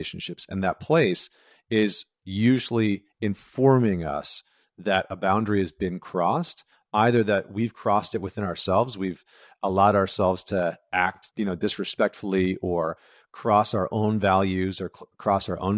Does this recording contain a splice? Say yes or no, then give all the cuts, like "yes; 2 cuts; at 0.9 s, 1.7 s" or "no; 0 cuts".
yes; 1 cut; at 11.2 s